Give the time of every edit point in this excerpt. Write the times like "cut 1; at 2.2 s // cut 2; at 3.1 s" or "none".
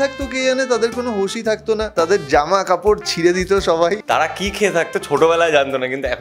cut 1; at 1.9 s // cut 2; at 4.0 s